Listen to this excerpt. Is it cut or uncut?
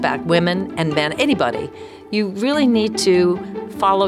uncut